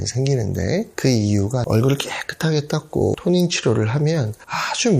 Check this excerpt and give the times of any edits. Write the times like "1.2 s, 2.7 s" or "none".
1.6 s, 3.2 s